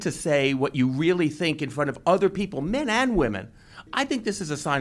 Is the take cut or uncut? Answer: cut